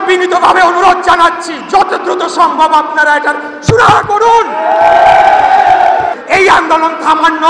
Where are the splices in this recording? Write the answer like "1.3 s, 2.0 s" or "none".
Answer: 6.2 s